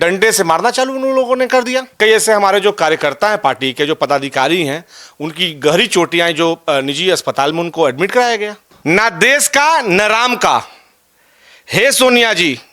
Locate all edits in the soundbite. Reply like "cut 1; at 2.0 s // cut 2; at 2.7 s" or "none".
cut 1; at 2.0 s // cut 2; at 8.7 s

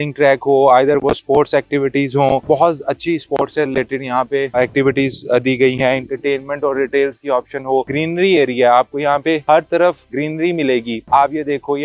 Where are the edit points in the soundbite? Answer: cut 1; at 7.9 s

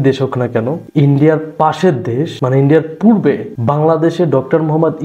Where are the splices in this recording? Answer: cut 1; at 0.8 s // cut 2; at 2.3 s // cut 3; at 3.5 s

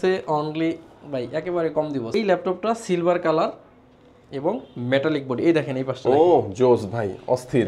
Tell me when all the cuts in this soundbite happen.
cut 1; at 2.1 s

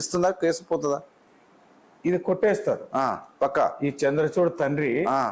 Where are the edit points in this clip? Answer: none

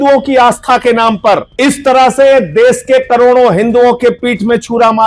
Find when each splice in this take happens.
cut 1; at 1.5 s

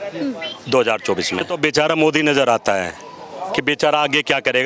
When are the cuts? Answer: cut 1; at 1.5 s

